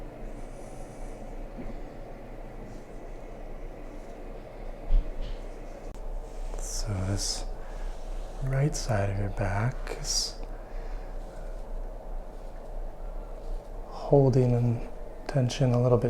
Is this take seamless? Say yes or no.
no